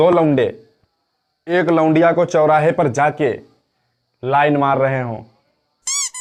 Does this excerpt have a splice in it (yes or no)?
no